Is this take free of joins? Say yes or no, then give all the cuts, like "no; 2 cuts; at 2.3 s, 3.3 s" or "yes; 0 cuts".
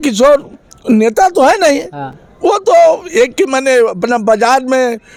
yes; 0 cuts